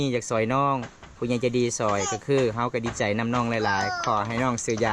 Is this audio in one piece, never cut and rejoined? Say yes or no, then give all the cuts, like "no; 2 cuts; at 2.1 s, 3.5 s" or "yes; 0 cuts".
yes; 0 cuts